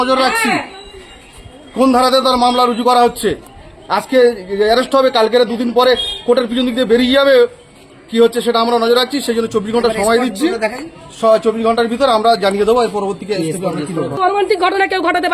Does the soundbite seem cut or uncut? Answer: cut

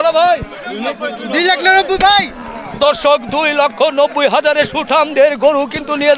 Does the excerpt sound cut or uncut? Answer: uncut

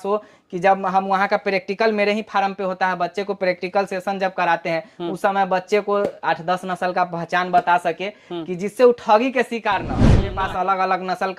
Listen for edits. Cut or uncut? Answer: cut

